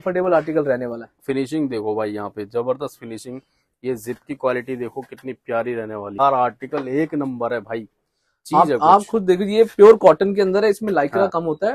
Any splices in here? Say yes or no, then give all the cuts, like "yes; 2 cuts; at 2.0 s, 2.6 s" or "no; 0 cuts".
yes; 2 cuts; at 1.2 s, 6.2 s